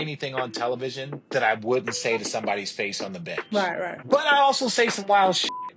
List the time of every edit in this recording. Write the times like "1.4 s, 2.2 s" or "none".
3.9 s